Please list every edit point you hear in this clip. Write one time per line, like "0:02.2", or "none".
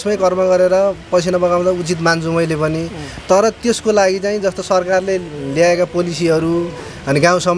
none